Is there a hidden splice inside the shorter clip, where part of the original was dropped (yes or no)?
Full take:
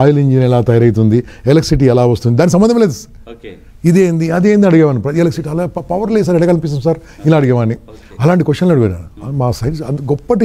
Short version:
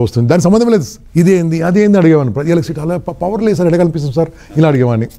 yes